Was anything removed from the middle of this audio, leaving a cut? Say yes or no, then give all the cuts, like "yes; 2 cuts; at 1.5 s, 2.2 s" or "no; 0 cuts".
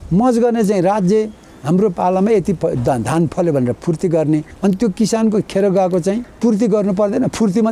yes; 2 cuts; at 4.5 s, 6.3 s